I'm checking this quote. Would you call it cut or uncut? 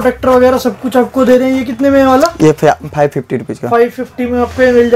uncut